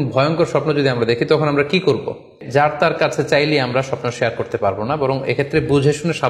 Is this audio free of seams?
no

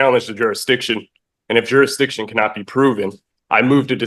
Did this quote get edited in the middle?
no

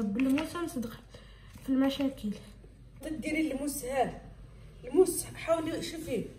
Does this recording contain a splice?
yes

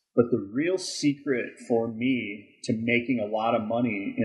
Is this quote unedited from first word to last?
yes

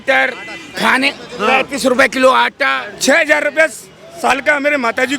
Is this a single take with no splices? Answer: no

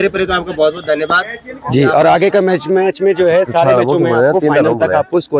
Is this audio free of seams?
yes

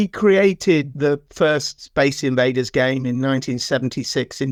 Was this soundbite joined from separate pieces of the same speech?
no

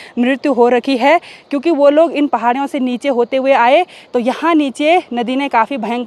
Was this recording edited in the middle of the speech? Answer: no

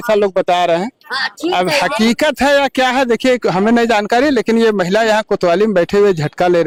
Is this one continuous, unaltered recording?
yes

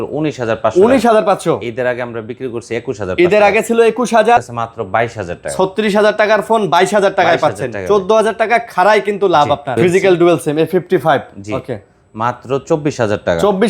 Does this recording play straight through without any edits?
no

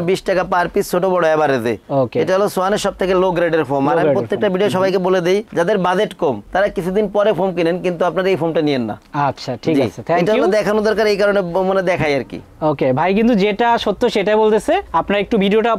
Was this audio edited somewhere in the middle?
no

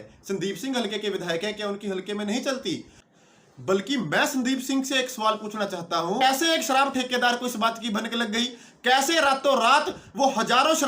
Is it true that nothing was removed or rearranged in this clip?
no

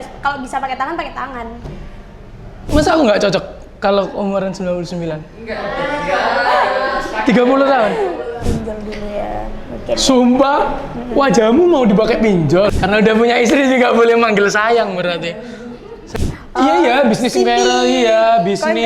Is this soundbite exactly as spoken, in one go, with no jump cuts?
no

